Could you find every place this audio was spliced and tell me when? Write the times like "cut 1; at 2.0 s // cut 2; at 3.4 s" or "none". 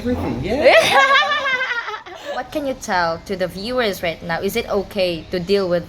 cut 1; at 2.5 s